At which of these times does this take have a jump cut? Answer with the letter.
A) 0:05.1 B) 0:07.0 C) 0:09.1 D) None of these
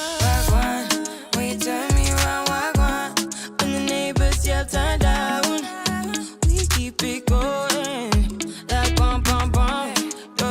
A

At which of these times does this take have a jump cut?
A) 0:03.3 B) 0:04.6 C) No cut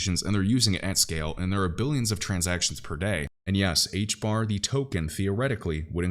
A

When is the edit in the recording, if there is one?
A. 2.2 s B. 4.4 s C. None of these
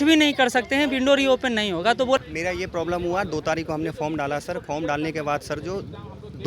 A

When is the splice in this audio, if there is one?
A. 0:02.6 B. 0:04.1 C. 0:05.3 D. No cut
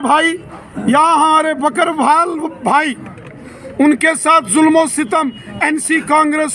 D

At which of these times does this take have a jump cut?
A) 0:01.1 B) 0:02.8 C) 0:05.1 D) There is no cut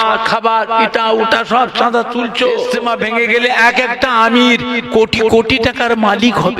B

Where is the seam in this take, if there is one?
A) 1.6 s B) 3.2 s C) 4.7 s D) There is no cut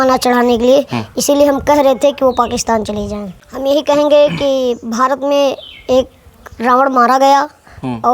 B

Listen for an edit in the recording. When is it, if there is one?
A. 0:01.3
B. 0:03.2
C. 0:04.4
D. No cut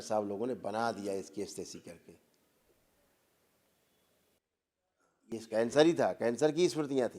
C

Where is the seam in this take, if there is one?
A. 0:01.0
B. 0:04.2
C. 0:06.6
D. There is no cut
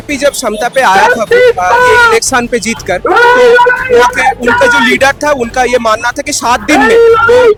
D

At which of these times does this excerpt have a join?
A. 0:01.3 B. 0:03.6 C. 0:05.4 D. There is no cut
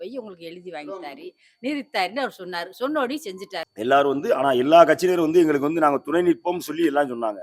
B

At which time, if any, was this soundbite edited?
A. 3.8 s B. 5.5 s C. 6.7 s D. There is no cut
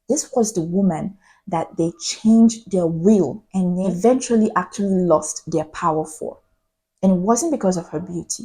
A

